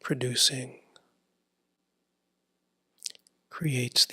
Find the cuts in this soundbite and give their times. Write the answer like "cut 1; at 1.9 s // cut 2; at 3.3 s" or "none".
cut 1; at 1.8 s